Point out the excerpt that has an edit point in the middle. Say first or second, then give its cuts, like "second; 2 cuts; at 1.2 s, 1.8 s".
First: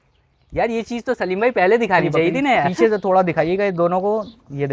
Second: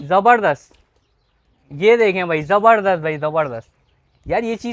first; 1 cut; at 2.7 s